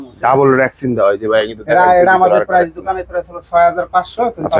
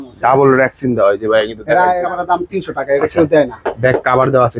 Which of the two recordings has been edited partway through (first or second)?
second